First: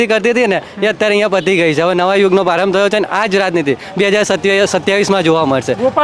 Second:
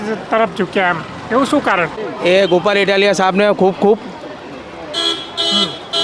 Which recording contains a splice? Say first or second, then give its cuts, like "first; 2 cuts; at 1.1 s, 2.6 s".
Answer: second; 1 cut; at 2.0 s